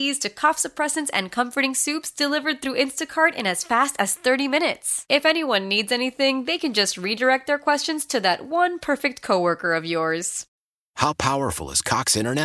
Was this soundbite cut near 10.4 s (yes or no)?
yes